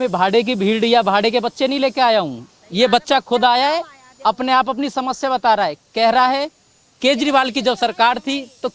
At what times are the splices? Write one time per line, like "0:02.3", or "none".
none